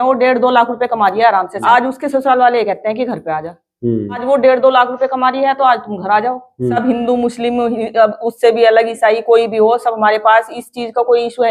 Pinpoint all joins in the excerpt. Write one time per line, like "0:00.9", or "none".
0:01.6
0:04.2
0:06.8